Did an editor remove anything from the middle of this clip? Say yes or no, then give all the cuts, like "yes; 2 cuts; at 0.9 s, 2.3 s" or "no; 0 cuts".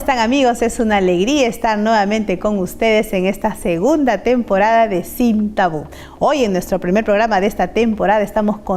no; 0 cuts